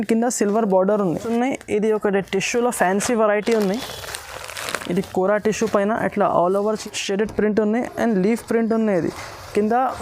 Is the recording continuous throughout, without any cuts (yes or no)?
no